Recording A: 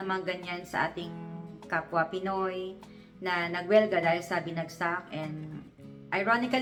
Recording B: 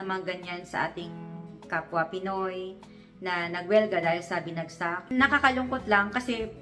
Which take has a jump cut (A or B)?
B